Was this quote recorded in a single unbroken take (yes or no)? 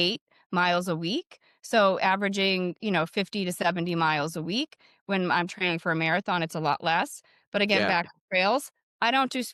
yes